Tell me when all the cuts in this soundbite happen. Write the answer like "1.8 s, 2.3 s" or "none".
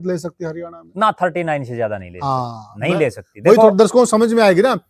none